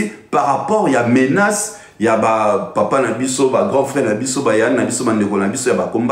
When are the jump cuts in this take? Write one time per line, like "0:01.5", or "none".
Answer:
none